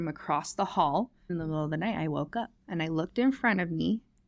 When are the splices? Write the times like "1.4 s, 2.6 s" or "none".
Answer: 1.3 s, 2.6 s